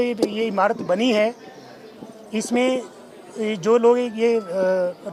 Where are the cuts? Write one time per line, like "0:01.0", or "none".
none